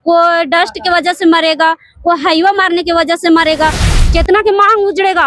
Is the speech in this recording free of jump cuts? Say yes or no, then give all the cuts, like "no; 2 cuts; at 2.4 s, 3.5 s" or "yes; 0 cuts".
no; 1 cut; at 3.9 s